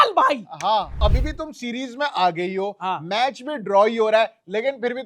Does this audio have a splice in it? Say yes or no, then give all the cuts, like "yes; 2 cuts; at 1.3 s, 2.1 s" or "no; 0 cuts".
yes; 1 cut; at 1.0 s